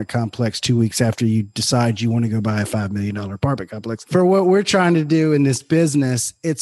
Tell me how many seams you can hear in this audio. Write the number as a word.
one